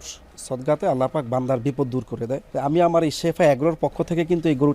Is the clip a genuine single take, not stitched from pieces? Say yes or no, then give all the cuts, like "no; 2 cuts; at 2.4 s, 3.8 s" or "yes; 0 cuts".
no; 1 cut; at 2.5 s